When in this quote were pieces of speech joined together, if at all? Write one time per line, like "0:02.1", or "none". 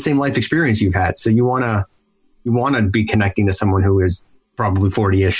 0:04.4

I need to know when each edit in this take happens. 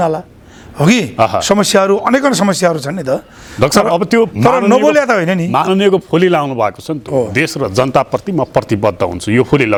none

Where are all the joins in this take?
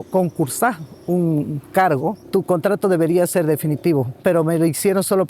0:02.2
0:04.2

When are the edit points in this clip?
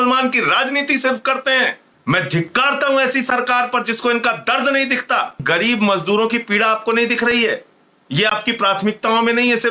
0:01.9
0:05.4

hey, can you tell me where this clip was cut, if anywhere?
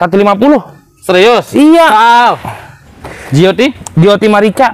0:02.8

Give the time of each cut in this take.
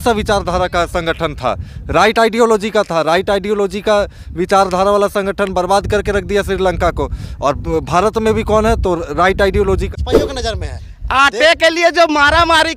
0:09.9

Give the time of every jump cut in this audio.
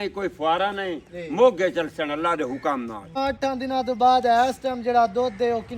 0:03.2

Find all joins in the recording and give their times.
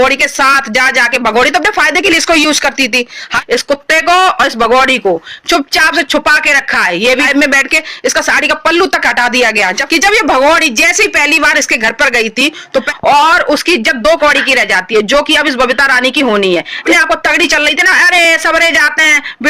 0:03.3
0:07.3
0:09.8
0:12.9
0:16.7

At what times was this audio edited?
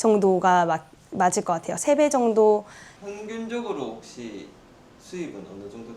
0:03.0

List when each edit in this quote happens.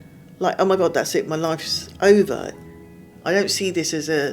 0:02.5

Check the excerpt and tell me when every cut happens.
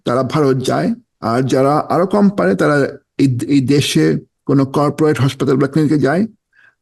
0:01.1
0:04.3

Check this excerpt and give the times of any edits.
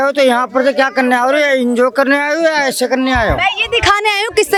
none

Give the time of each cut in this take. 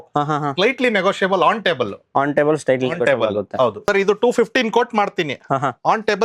0:03.8

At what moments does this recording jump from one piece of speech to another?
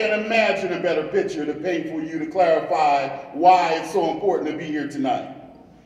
none

